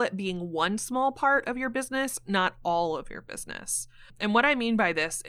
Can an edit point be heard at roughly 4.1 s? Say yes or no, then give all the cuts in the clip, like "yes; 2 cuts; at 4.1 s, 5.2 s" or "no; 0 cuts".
yes; 1 cut; at 4.1 s